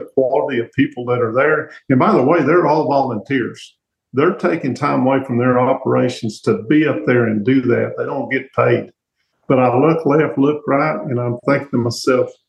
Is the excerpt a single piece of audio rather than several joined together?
yes; 0 cuts

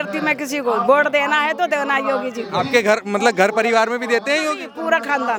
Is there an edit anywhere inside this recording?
no; 0 cuts

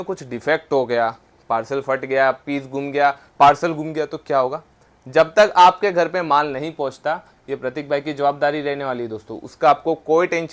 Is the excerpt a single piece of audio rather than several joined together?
yes; 0 cuts

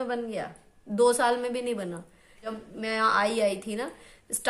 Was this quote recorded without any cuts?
no; 1 cut; at 2.5 s

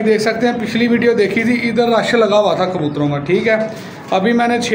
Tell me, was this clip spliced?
no; 0 cuts

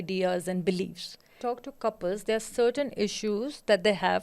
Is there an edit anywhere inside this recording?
yes; 1 cut; at 1.4 s

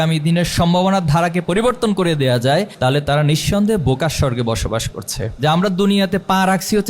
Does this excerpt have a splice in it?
yes; 2 cuts; at 2.7 s, 5.3 s

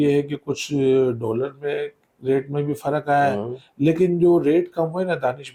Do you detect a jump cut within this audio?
no; 0 cuts

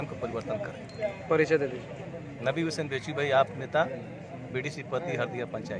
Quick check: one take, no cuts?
yes; 0 cuts

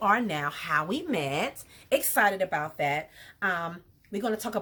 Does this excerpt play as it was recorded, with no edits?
yes; 0 cuts

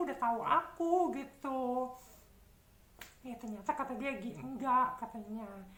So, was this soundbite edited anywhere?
no; 0 cuts

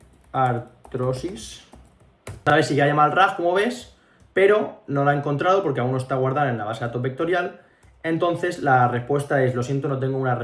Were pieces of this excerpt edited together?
yes; 1 cut; at 2.5 s

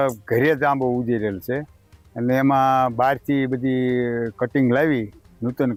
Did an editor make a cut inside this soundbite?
no; 0 cuts

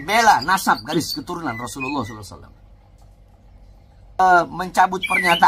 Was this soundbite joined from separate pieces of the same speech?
yes; 1 cut; at 4.2 s

